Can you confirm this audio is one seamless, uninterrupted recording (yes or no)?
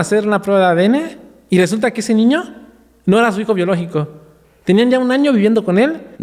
yes